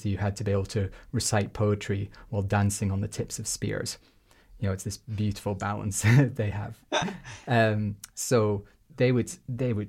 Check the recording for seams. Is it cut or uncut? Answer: uncut